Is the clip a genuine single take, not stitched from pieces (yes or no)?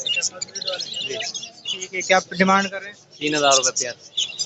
yes